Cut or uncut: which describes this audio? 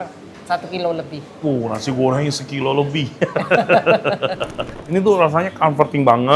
cut